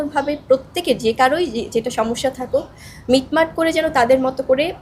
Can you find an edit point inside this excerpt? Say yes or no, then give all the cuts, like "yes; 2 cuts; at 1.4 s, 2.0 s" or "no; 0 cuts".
no; 0 cuts